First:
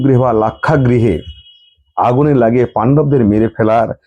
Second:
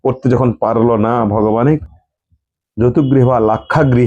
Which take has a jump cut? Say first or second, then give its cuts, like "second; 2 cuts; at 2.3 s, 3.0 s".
second; 1 cut; at 1.8 s